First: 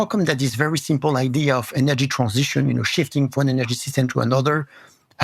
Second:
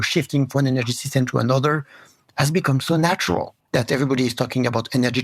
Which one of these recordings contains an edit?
second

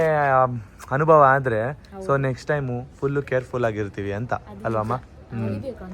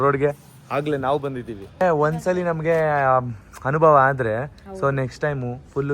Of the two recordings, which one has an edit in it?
second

